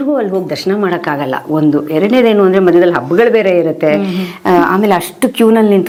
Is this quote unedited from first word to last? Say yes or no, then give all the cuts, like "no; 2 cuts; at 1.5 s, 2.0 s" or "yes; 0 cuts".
yes; 0 cuts